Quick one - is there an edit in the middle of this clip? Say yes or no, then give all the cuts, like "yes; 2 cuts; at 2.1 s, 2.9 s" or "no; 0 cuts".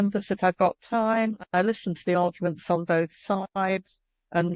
no; 0 cuts